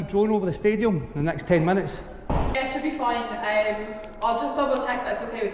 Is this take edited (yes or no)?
yes